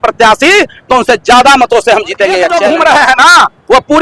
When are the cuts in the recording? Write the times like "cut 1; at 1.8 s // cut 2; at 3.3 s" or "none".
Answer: cut 1; at 2.6 s

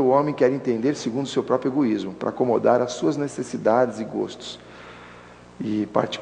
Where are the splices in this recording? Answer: none

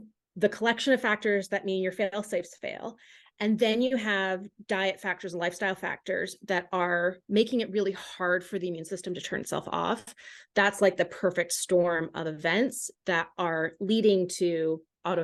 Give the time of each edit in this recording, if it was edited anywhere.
none

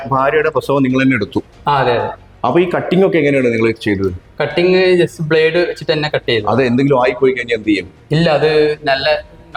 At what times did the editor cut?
none

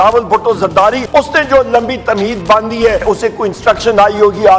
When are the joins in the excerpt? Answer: cut 1; at 1.1 s // cut 2; at 3.0 s

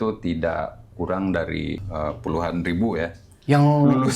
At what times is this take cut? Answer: cut 1; at 1.8 s

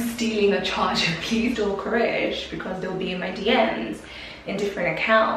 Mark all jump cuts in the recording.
cut 1; at 1.5 s

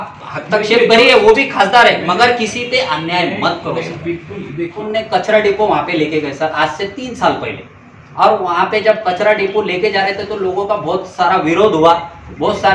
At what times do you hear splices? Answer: cut 1; at 4.9 s

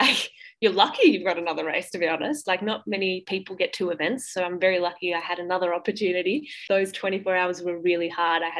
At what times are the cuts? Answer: cut 1; at 6.5 s

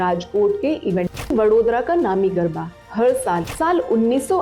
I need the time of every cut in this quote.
cut 1; at 1.3 s // cut 2; at 3.5 s

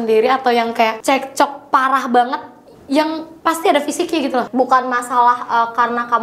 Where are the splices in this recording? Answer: cut 1; at 1.0 s // cut 2; at 3.3 s // cut 3; at 4.5 s

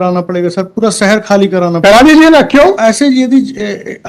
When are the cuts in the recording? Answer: none

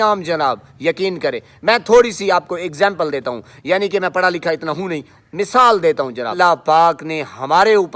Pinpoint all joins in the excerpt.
cut 1; at 6.3 s

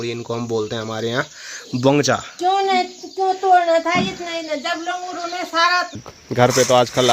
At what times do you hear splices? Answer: cut 1; at 6.1 s

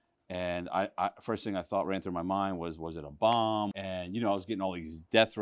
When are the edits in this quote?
cut 1; at 3.7 s

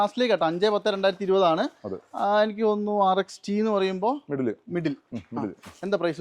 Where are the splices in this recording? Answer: none

